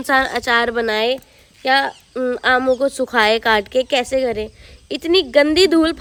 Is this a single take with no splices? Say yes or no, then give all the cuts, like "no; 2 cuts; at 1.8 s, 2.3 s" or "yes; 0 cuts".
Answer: yes; 0 cuts